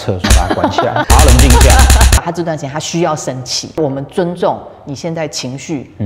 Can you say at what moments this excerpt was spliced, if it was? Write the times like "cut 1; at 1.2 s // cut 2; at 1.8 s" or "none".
cut 1; at 2.2 s // cut 2; at 3.8 s